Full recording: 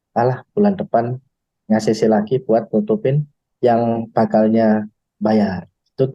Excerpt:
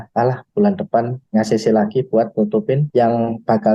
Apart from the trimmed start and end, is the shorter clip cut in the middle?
yes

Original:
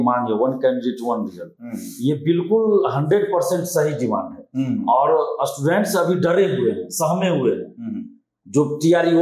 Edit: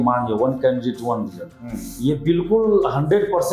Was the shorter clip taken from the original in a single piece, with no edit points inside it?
yes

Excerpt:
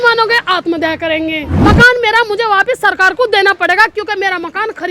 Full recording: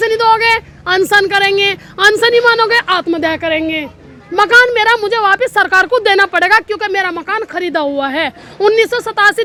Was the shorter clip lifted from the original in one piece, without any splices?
no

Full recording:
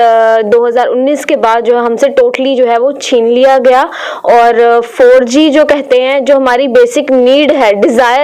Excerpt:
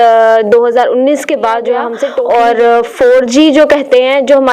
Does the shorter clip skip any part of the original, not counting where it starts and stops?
yes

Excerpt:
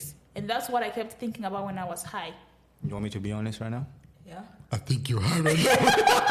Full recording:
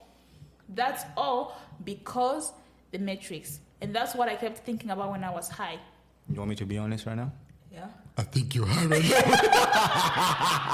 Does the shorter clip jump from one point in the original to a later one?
no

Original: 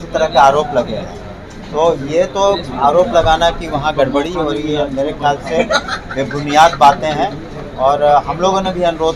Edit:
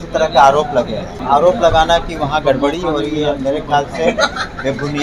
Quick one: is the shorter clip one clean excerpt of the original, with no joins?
no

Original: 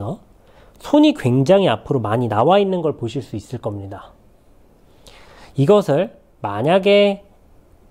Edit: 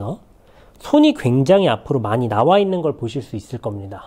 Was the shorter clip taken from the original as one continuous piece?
yes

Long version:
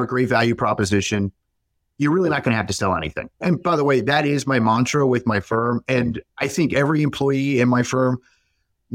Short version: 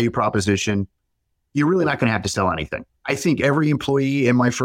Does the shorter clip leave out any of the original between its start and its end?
yes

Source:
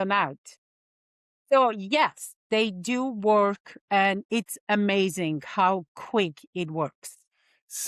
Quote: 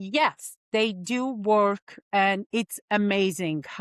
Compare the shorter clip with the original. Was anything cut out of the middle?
no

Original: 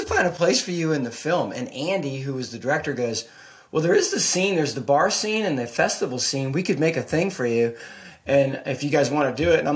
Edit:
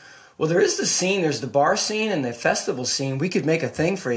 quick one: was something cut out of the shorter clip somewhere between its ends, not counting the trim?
no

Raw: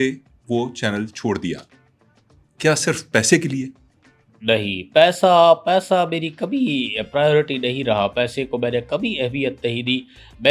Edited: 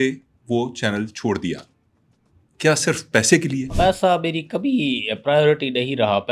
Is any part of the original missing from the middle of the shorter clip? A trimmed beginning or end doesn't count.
yes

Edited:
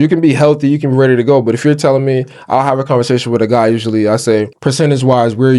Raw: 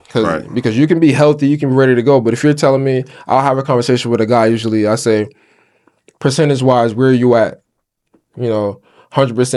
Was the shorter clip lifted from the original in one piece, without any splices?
no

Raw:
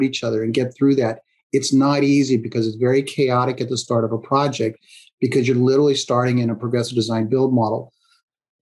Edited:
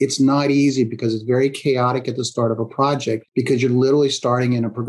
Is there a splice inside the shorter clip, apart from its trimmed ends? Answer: yes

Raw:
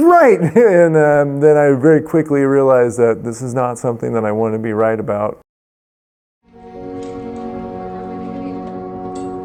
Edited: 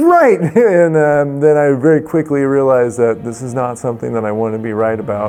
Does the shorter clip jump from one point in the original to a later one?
no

